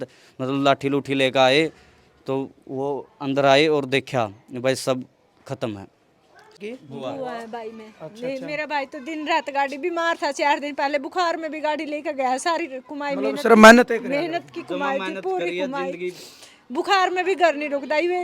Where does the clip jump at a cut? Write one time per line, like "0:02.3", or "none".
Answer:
0:06.6